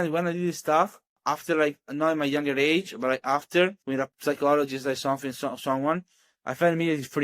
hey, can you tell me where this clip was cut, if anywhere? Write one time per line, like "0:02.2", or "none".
0:01.1
0:03.8